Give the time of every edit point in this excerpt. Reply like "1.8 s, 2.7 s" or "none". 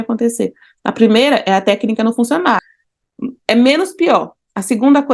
2.6 s